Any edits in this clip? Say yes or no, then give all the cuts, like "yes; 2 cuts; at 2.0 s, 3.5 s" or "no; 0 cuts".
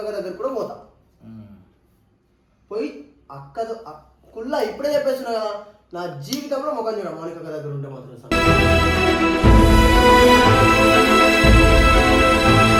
no; 0 cuts